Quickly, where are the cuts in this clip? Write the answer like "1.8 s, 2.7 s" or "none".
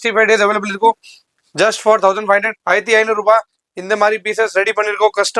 2.5 s